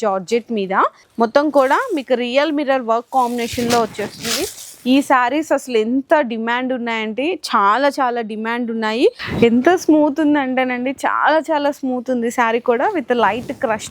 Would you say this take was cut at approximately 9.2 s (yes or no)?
yes